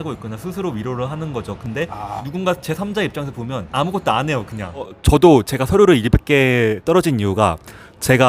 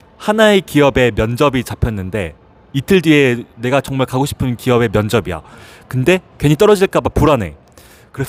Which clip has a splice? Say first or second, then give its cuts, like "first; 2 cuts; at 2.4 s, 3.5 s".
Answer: first; 3 cuts; at 1.8 s, 3.7 s, 5.0 s